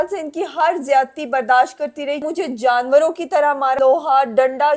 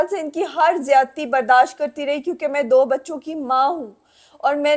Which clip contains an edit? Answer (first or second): first